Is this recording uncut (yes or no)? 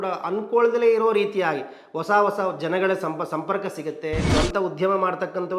no